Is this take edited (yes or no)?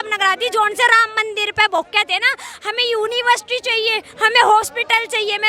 no